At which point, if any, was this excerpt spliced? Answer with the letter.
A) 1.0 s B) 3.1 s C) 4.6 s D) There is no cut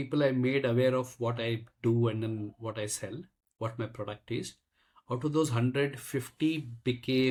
D